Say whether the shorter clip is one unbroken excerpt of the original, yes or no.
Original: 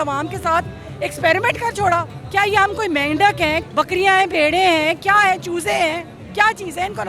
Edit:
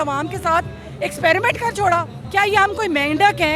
yes